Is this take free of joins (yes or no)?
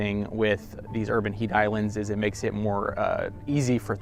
yes